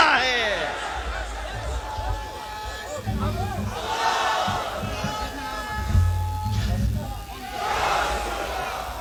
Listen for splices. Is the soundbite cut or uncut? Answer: uncut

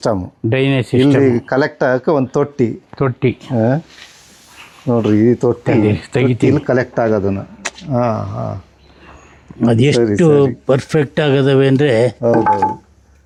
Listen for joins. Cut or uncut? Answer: uncut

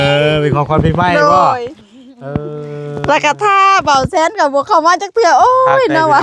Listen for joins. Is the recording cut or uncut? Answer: uncut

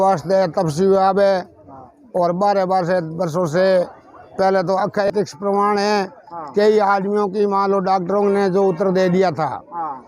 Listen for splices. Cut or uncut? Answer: cut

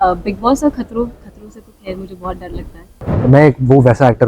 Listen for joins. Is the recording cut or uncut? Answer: cut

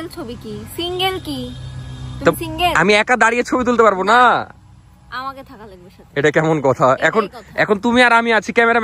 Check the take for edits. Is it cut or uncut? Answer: uncut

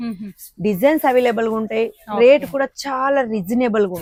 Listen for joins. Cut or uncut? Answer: uncut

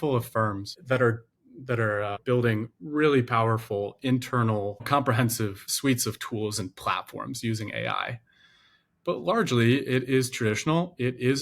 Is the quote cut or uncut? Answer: cut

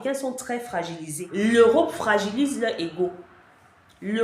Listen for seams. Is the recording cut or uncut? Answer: cut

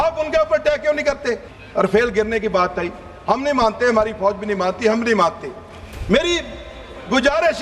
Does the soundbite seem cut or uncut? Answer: cut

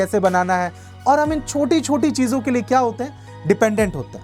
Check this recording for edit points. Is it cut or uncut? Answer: uncut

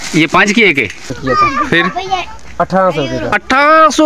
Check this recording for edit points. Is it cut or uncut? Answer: cut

